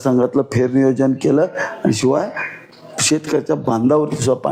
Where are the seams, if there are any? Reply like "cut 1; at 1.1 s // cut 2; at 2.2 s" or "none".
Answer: none